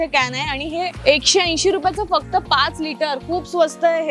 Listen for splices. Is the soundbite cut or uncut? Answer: uncut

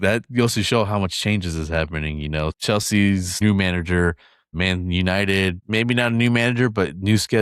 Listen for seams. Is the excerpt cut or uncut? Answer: cut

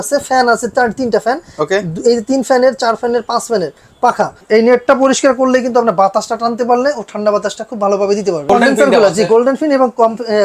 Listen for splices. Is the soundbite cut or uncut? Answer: cut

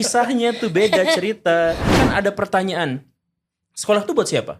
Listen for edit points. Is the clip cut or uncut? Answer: cut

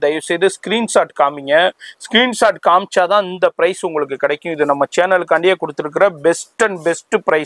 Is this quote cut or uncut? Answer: uncut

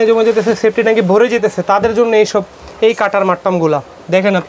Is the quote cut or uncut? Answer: uncut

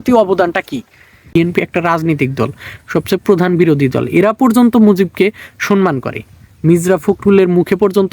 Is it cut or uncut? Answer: cut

